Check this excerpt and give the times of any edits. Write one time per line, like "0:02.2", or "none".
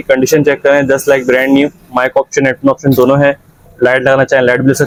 none